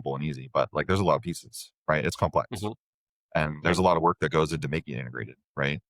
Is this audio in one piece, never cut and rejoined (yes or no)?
yes